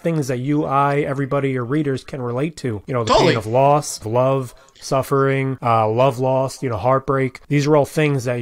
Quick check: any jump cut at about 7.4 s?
yes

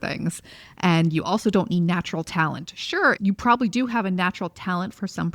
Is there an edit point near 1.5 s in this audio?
no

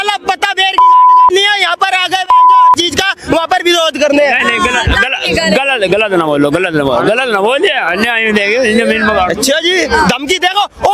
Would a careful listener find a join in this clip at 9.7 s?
no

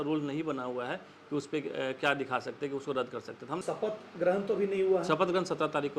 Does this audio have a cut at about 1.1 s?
no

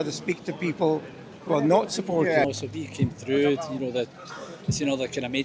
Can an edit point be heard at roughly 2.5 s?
yes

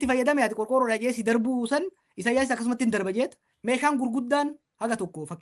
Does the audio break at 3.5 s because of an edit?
yes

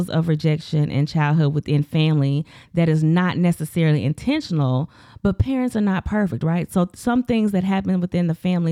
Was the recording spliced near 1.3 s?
no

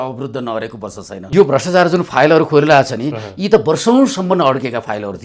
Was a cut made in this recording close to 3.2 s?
no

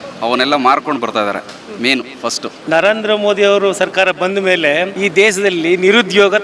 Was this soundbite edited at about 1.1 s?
no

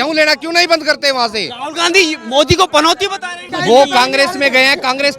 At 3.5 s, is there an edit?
yes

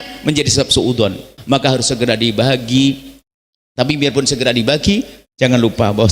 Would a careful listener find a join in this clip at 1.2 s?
yes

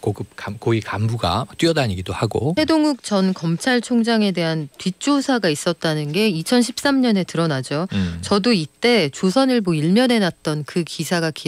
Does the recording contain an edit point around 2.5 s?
yes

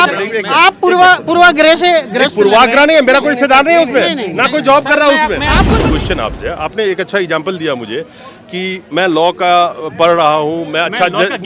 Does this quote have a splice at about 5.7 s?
yes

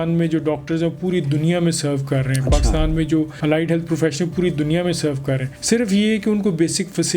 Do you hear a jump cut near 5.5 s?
yes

